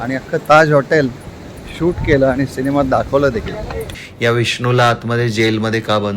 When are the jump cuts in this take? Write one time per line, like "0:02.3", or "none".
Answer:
0:03.8